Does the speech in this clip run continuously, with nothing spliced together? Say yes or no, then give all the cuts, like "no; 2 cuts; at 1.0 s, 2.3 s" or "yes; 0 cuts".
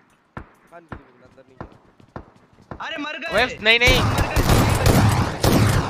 yes; 0 cuts